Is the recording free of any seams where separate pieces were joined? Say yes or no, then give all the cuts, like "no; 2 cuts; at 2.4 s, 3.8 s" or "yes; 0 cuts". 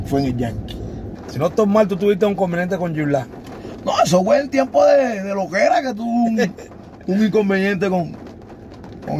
no; 1 cut; at 1.1 s